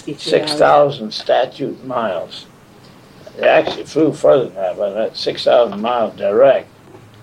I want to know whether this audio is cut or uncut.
uncut